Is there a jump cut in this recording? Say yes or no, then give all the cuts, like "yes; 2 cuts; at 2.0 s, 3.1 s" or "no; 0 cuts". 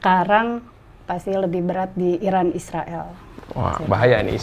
no; 0 cuts